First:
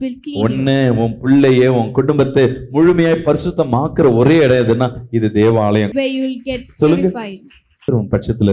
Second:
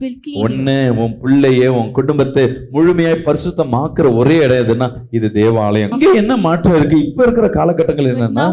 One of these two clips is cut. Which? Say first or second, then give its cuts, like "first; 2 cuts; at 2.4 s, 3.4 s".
second; 1 cut; at 5.9 s